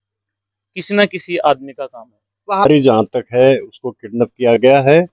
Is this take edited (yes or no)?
yes